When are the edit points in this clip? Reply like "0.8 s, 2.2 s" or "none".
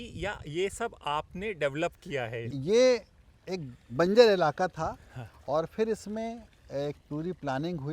2.5 s

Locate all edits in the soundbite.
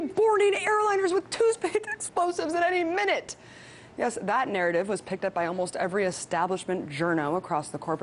none

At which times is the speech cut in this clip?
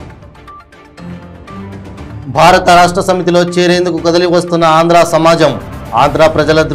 2.2 s

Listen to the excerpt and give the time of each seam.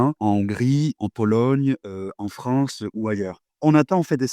3.4 s

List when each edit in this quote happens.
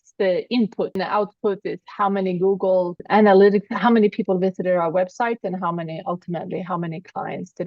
1.0 s, 3.0 s

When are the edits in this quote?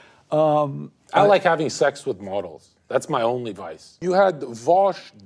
4.0 s

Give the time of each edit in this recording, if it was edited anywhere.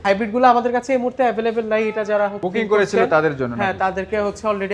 none

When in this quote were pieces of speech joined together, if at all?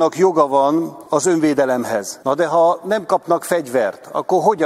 1.0 s, 2.1 s

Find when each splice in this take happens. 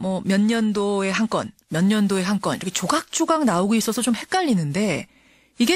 none

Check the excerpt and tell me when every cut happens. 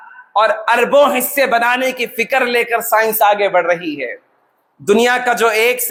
none

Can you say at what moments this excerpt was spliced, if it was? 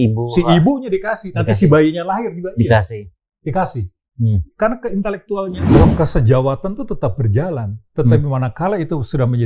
5.8 s

